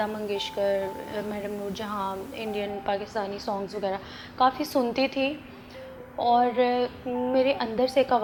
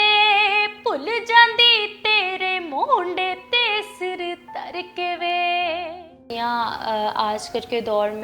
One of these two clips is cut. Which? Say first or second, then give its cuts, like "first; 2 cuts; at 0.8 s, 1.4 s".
second; 1 cut; at 6.3 s